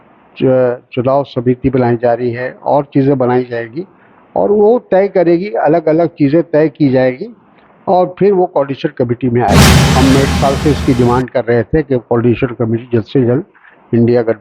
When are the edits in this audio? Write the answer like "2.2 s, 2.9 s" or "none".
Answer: 9.8 s